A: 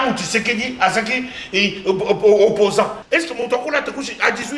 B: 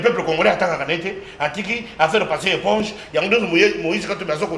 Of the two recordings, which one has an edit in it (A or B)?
A